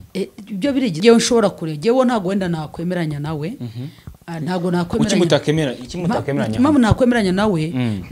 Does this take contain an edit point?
yes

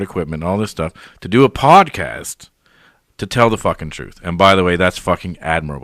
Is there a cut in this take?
yes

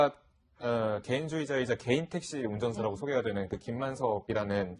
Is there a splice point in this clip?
yes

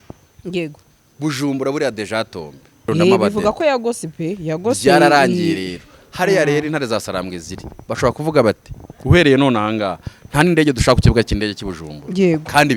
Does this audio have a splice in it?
yes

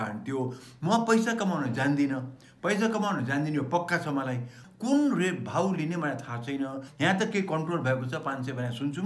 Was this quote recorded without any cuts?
no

